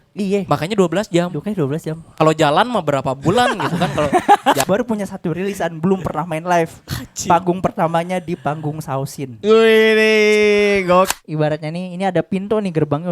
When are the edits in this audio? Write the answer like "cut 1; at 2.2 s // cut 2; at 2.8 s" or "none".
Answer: cut 1; at 4.6 s // cut 2; at 11.1 s